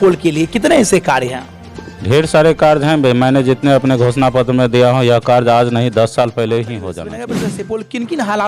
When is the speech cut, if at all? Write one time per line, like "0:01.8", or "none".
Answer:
0:07.3

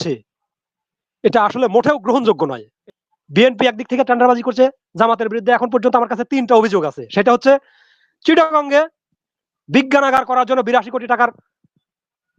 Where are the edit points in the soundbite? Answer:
0:02.8

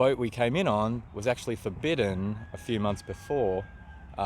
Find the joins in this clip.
none

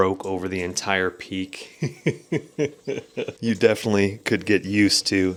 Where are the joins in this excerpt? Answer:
none

